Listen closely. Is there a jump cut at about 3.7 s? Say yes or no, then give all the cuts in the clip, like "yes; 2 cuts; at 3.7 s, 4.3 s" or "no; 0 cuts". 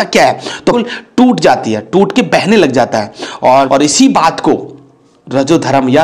yes; 2 cuts; at 0.8 s, 3.7 s